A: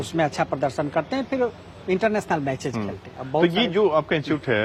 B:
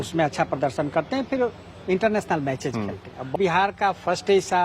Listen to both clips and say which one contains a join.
B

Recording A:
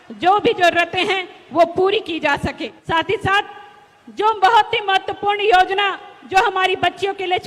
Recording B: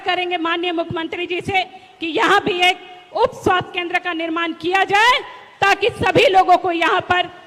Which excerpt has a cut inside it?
A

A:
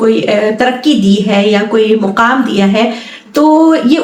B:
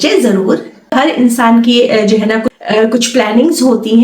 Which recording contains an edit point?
B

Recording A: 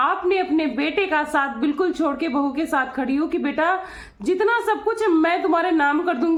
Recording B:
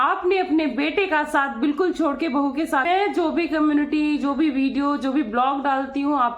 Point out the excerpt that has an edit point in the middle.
B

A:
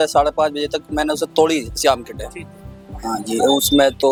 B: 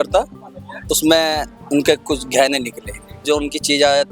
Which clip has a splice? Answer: B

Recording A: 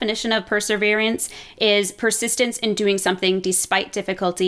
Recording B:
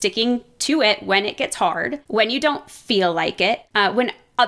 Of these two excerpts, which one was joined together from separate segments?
B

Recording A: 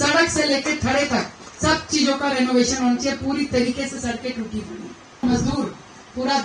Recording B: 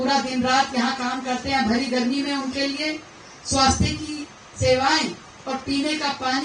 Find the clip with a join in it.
A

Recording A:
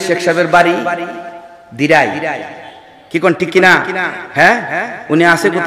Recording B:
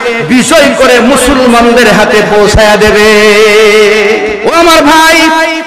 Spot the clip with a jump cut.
B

